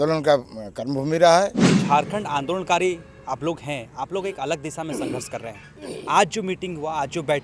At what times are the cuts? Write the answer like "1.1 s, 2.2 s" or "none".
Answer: 1.7 s